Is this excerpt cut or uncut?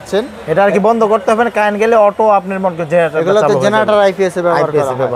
uncut